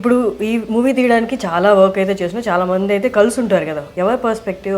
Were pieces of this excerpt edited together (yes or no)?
yes